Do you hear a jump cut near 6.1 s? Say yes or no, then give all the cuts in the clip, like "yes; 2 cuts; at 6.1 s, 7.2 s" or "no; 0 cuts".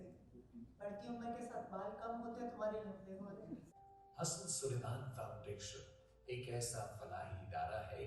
no; 1 cut; at 3.7 s